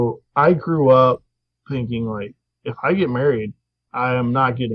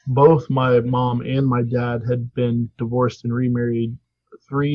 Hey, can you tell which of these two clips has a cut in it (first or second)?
second